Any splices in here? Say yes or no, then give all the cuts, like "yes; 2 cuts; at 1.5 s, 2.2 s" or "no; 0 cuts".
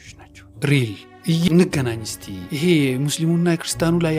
yes; 1 cut; at 1.5 s